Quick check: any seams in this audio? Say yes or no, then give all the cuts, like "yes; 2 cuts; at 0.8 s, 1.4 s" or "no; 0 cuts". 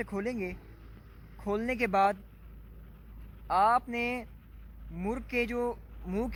no; 0 cuts